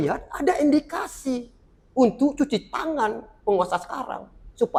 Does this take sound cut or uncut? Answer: uncut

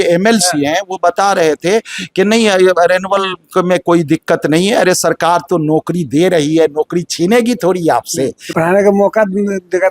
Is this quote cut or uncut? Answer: cut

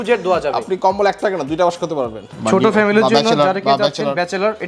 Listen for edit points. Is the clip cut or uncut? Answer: cut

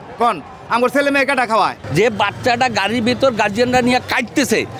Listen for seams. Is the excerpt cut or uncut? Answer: cut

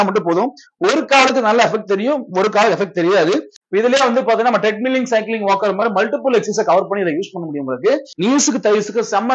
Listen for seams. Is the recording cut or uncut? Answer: cut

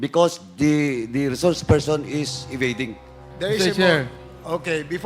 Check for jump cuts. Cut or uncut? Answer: cut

